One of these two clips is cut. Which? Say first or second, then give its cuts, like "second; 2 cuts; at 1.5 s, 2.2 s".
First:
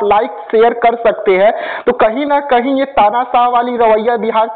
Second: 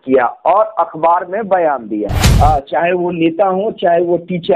second; 1 cut; at 2.2 s